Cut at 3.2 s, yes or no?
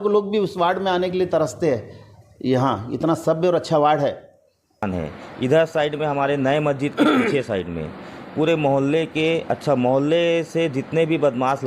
no